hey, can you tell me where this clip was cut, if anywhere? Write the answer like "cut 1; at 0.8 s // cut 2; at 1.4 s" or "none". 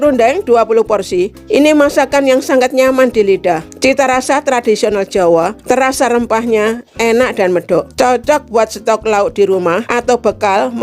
cut 1; at 1.4 s // cut 2; at 3.7 s // cut 3; at 5.6 s // cut 4; at 7.9 s // cut 5; at 9.9 s